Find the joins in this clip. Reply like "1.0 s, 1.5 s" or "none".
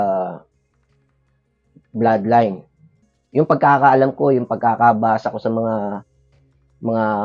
2.9 s